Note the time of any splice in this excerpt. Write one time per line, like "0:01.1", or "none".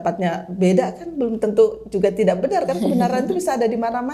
none

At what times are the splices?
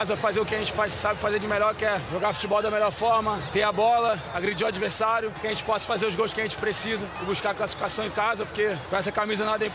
0:02.1
0:03.4
0:05.4
0:07.1
0:08.8

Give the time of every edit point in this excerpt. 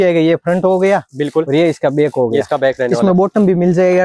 none

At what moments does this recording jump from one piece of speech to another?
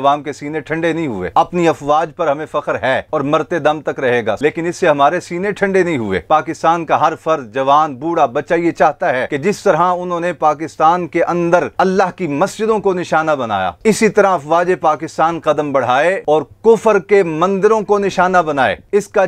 0:01.2
0:04.4
0:09.3
0:16.2

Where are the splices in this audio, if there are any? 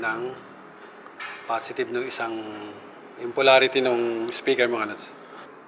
none

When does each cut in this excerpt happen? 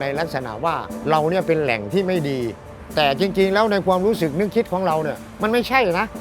0:00.9
0:02.8

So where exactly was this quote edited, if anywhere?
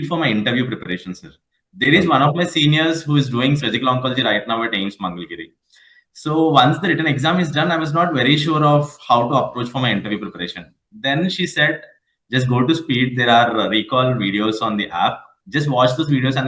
none

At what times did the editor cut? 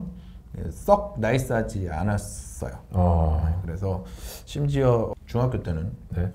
0:05.1

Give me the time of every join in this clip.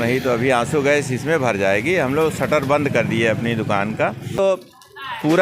0:04.3

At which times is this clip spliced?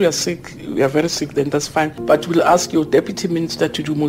0:01.9

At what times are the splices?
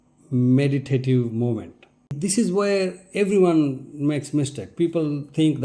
0:02.1

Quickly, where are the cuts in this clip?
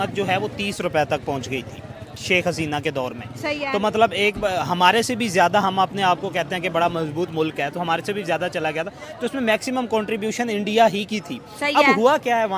none

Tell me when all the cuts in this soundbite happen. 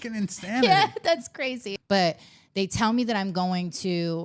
0:01.7

